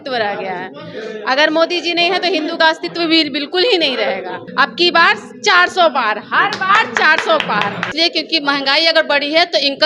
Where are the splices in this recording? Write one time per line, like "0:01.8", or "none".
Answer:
0:04.4
0:07.9